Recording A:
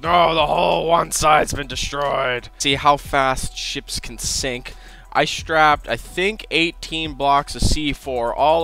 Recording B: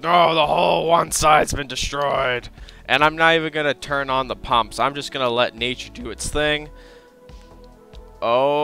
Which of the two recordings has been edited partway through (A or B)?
A